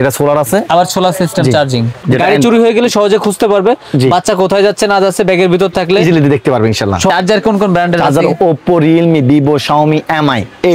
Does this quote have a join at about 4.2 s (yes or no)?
no